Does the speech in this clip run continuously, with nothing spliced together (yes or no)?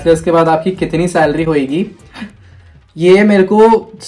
yes